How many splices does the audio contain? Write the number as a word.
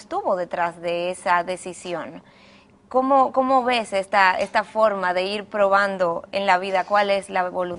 zero